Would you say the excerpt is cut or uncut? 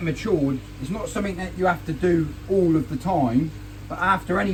uncut